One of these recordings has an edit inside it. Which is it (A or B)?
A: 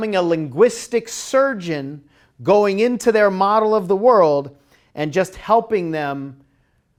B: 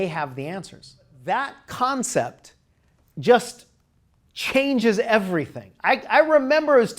B